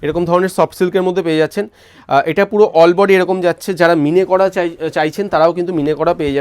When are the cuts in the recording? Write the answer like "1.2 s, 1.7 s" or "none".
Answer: none